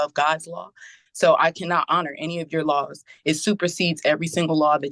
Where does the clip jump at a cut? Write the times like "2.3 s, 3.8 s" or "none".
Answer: none